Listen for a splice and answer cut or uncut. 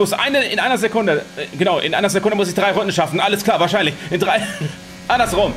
uncut